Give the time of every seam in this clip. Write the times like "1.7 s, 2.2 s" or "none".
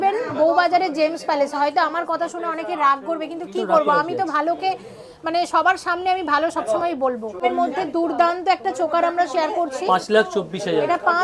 7.4 s

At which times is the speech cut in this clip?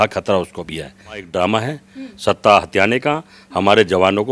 1.3 s

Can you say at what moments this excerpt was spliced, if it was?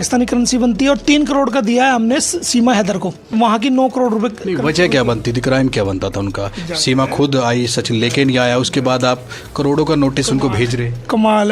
3.3 s

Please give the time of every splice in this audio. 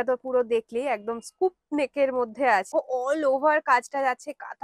2.7 s

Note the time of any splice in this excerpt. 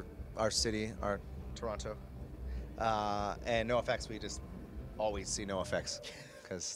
2.6 s

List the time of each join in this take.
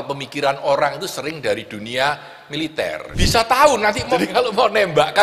3.0 s, 4.1 s

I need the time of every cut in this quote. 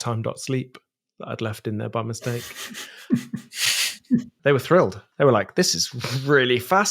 4.3 s, 5.0 s

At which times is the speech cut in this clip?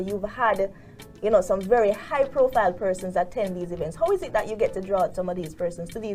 none

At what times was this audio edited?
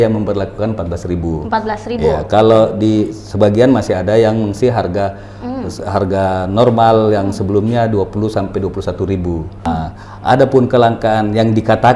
9.7 s

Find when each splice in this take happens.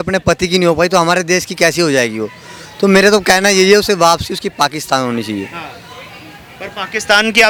none

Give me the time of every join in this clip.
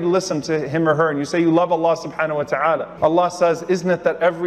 none

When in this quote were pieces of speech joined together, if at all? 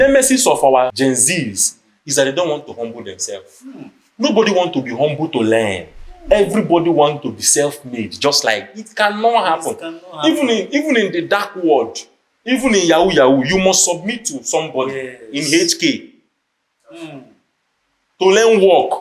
0.9 s

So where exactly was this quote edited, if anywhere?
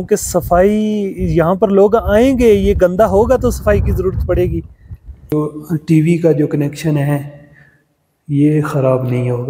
5.3 s

